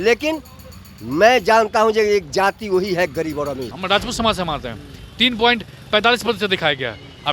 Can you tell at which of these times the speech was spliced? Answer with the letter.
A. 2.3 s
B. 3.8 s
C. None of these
B